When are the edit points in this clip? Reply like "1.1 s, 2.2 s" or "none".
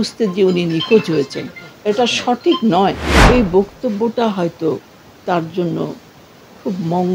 3.2 s